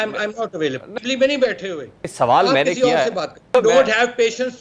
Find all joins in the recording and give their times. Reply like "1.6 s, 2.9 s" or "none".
0.9 s, 2.0 s, 3.5 s